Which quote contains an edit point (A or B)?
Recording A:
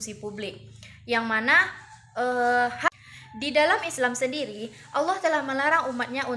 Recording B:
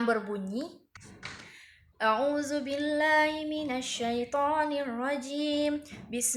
A